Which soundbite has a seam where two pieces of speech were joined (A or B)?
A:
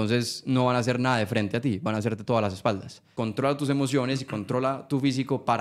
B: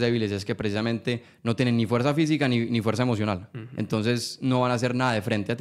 A